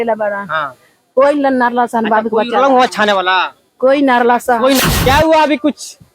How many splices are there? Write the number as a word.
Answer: one